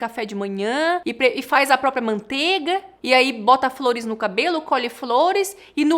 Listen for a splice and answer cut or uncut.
cut